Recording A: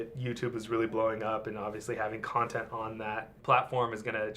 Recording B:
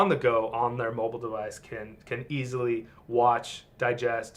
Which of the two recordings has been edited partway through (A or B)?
A